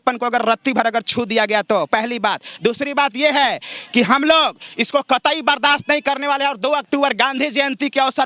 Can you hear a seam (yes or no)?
no